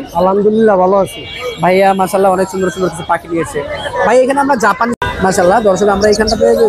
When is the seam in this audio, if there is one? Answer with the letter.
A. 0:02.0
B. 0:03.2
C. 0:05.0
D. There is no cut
C